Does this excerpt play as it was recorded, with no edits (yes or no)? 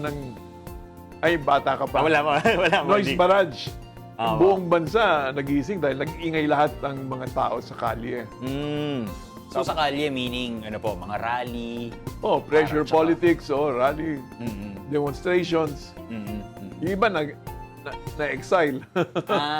no